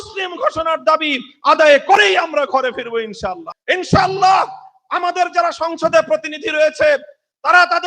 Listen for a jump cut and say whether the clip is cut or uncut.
cut